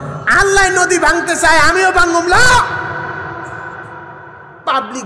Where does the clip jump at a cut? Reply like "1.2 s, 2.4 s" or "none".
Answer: none